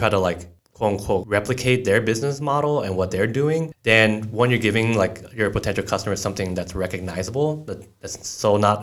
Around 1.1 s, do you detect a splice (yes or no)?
yes